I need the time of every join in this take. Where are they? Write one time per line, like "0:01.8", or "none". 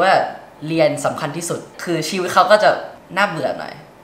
0:01.7
0:03.0

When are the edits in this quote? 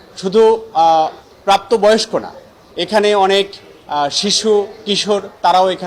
none

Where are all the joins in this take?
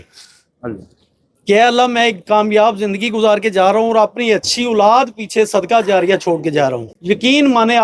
0:06.9

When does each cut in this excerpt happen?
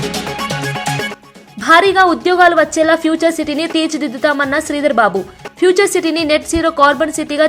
0:01.0

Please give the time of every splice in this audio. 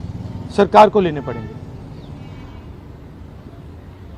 none

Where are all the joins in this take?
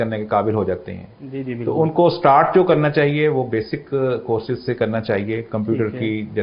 none

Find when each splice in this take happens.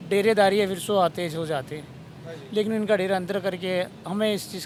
none

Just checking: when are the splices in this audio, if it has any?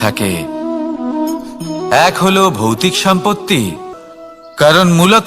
0:03.9

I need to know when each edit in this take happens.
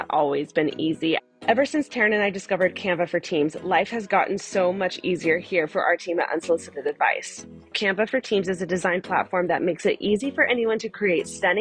0:01.2
0:07.7

